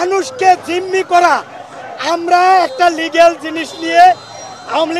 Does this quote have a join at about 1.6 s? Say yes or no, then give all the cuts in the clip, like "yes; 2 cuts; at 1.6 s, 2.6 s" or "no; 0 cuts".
no; 0 cuts